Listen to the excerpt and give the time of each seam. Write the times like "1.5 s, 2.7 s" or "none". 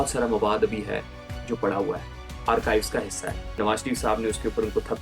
3.6 s